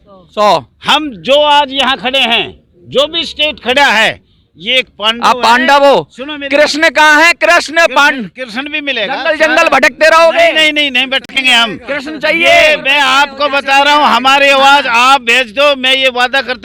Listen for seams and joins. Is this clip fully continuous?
yes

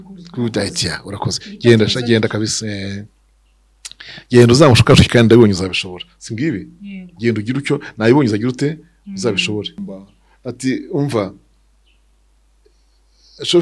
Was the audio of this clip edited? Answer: yes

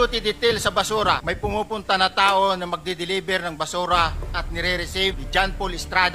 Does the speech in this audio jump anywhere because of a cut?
yes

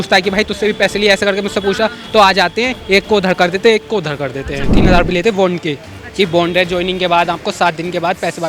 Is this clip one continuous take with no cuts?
no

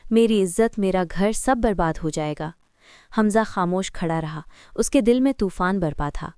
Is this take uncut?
yes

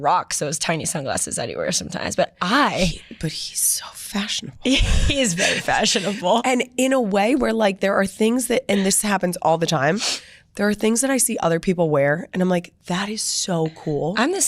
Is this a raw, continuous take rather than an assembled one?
yes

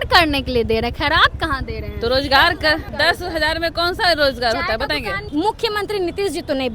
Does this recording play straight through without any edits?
no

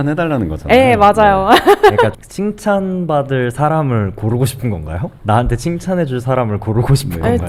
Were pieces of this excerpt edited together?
no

